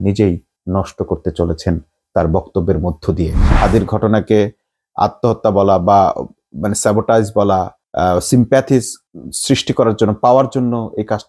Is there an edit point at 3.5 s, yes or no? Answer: yes